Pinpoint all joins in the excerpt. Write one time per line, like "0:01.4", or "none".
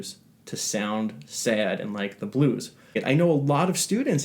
0:03.0